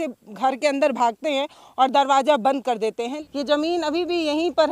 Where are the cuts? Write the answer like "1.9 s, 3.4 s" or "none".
3.2 s